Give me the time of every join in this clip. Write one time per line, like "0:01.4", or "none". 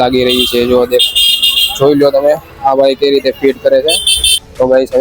none